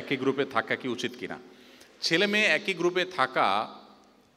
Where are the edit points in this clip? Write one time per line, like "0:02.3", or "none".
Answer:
none